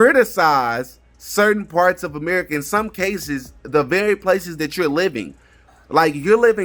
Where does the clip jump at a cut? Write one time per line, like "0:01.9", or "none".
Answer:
none

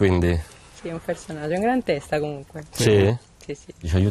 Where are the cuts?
0:01.5

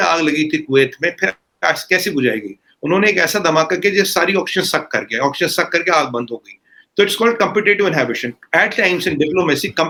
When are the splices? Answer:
none

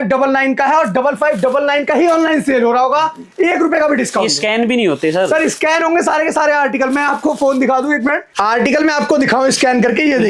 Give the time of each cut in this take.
none

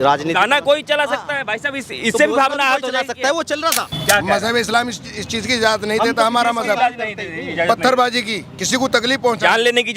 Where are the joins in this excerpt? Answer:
0:03.9

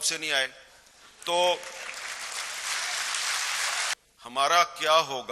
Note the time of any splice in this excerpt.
0:03.9

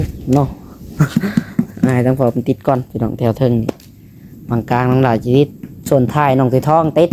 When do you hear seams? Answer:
none

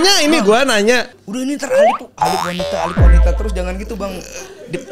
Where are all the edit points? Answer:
0:01.2

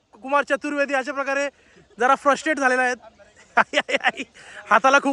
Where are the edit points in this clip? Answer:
none

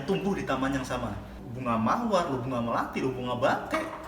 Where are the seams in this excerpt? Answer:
0:01.4

